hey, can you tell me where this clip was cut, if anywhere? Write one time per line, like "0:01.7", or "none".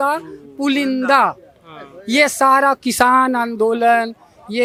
none